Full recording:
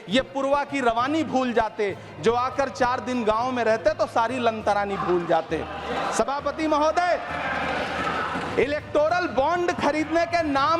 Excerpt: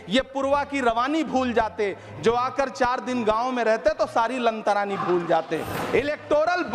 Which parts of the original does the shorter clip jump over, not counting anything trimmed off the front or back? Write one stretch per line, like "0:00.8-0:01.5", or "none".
0:05.7-0:08.4